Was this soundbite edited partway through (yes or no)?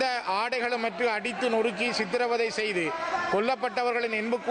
no